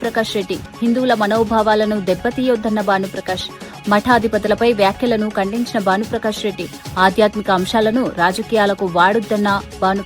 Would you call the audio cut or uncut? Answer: uncut